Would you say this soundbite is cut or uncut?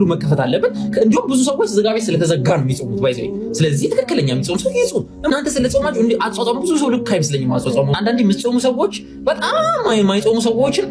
uncut